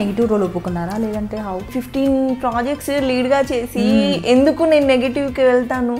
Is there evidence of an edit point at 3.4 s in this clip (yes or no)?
no